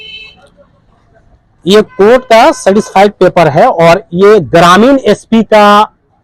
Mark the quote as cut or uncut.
uncut